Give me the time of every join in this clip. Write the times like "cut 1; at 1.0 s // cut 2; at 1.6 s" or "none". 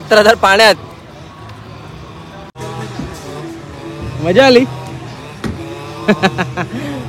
cut 1; at 2.6 s